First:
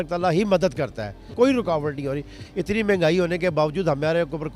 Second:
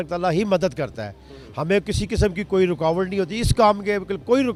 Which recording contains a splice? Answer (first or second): first